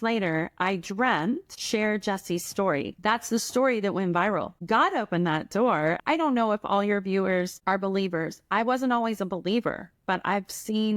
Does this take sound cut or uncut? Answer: cut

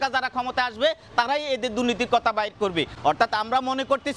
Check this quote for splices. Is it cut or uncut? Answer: uncut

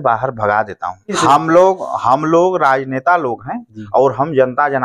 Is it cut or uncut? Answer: uncut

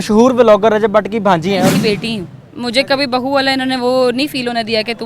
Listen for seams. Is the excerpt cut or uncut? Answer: cut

